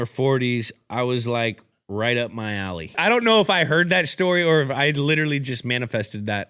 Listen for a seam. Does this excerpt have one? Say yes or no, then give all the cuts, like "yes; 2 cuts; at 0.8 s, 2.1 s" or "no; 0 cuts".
yes; 1 cut; at 3.0 s